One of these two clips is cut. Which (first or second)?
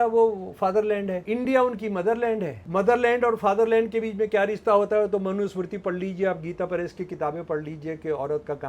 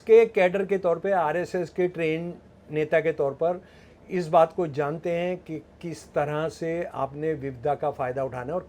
first